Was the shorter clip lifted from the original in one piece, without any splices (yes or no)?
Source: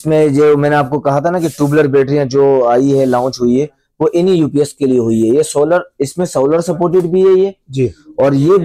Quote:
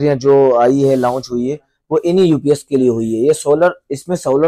yes